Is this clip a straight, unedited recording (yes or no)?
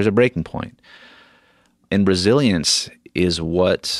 no